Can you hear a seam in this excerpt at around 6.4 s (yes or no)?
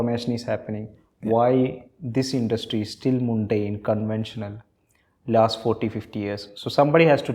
no